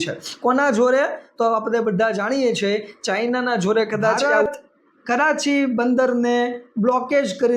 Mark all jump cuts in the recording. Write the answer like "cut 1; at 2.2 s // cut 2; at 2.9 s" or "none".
cut 1; at 4.3 s